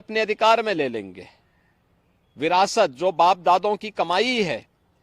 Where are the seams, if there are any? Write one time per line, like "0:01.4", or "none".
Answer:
none

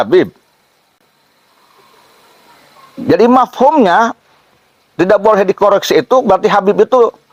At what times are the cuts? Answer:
none

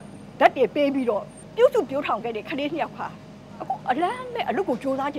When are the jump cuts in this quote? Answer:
0:01.4

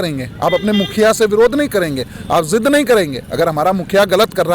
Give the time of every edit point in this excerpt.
none

